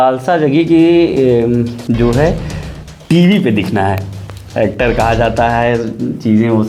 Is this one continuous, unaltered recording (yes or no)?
yes